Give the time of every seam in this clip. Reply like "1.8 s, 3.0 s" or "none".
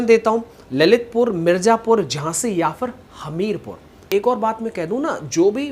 4.0 s